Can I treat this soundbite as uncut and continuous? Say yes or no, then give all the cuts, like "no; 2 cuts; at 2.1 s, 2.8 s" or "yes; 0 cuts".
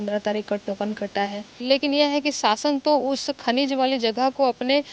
no; 1 cut; at 1.6 s